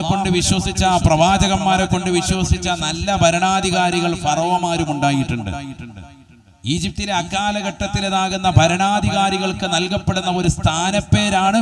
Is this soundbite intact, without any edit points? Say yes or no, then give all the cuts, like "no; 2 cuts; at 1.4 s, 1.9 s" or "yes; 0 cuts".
yes; 0 cuts